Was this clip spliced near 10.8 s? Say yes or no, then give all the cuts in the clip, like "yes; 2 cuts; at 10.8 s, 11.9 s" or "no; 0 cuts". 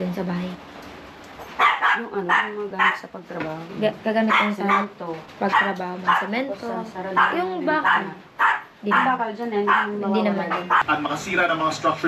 yes; 1 cut; at 10.8 s